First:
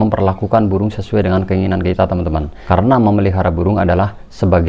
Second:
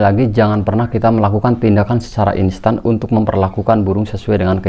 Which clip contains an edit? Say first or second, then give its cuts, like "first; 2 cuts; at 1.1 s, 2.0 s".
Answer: first; 1 cut; at 2.5 s